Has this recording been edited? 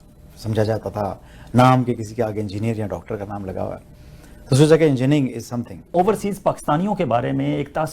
yes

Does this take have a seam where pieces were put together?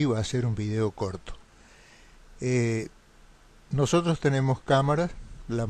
yes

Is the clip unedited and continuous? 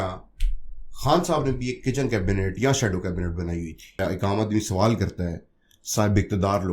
no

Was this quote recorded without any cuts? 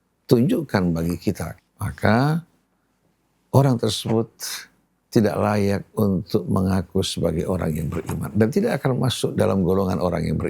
no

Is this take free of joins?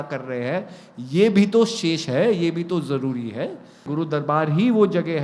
no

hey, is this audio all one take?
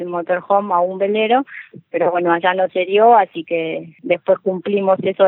no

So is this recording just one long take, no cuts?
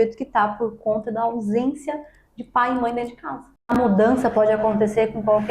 no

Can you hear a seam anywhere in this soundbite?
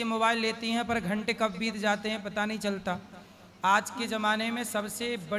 no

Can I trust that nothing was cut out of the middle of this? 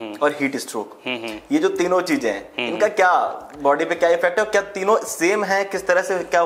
yes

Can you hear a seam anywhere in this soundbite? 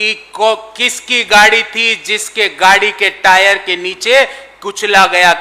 no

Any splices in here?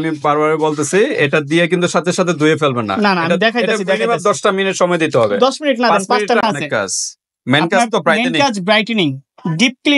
yes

